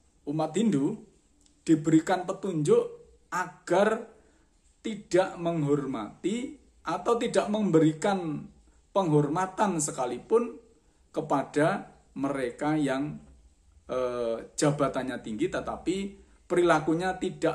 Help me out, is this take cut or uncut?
uncut